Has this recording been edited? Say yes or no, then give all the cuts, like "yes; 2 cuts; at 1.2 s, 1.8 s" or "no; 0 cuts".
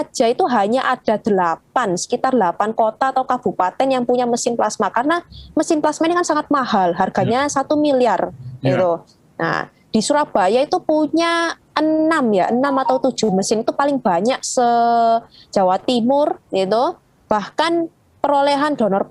no; 0 cuts